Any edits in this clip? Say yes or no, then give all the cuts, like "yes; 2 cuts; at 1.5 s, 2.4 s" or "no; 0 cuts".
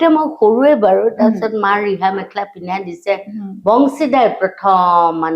no; 0 cuts